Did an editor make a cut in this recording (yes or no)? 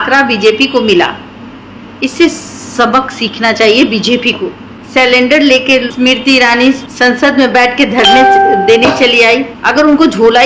yes